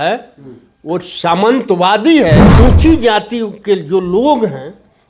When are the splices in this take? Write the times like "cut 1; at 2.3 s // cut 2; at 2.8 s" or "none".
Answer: cut 1; at 2.5 s